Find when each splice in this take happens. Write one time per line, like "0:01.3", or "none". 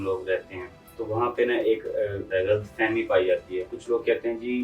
0:02.3
0:03.8